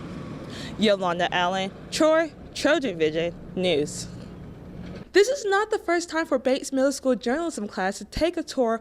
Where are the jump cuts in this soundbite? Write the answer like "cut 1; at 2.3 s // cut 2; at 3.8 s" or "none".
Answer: cut 1; at 5.0 s